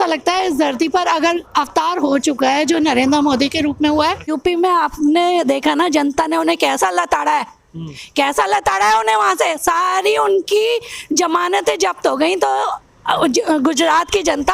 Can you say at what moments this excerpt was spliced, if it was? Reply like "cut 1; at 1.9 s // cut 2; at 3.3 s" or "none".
cut 1; at 4.4 s